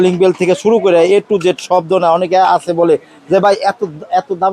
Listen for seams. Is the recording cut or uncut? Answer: uncut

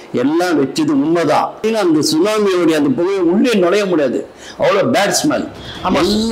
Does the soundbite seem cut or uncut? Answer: cut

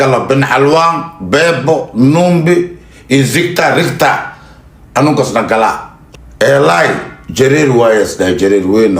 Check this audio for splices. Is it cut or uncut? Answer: cut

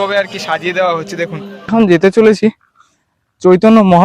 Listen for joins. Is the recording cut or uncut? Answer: cut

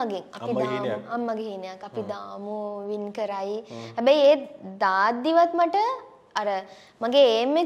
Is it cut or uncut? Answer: uncut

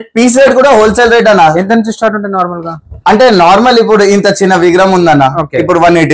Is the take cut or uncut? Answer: uncut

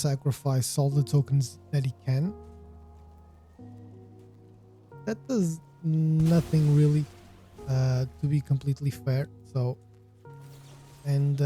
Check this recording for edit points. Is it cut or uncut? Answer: cut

